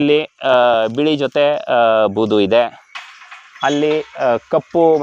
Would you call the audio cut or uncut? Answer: uncut